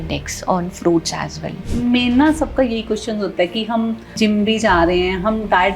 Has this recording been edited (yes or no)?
yes